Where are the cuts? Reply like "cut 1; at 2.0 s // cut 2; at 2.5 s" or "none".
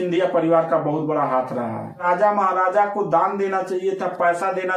cut 1; at 2.0 s